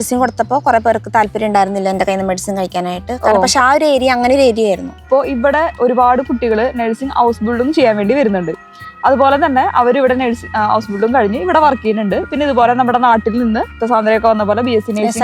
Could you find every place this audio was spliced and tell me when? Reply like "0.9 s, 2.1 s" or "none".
5.0 s